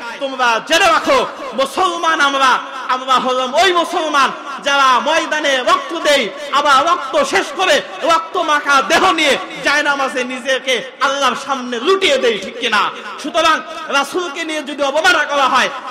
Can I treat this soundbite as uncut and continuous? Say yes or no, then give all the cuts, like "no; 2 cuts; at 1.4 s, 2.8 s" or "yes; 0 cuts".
yes; 0 cuts